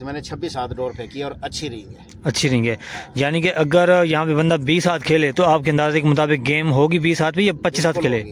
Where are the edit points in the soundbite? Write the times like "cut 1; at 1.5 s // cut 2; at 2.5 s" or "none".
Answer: none